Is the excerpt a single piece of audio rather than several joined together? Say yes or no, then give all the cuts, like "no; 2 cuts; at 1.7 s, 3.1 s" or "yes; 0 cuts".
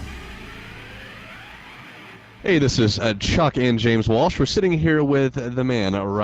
no; 1 cut; at 2.3 s